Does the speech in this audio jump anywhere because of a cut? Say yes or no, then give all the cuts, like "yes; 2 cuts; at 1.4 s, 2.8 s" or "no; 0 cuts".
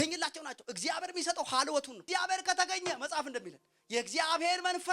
yes; 1 cut; at 2.0 s